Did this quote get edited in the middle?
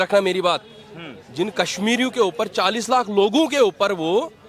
no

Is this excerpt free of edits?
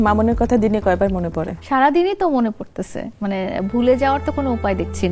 no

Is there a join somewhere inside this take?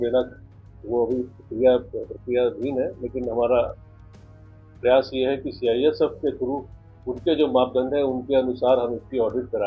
no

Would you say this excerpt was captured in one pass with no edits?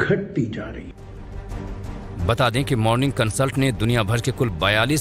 no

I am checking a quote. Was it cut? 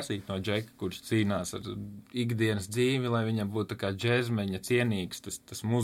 no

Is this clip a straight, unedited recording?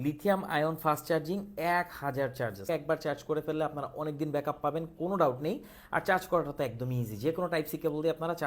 no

